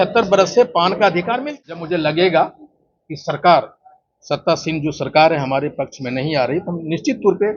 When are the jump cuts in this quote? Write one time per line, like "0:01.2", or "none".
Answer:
0:01.4